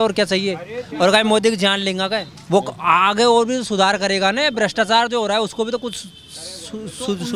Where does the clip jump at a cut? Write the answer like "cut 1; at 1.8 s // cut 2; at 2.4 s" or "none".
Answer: cut 1; at 2.3 s